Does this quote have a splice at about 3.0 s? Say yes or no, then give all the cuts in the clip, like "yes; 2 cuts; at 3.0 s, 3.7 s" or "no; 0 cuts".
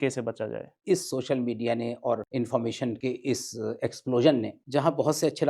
yes; 4 cuts; at 0.8 s, 2.3 s, 3.0 s, 4.6 s